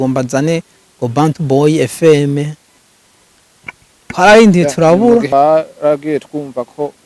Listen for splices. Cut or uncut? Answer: cut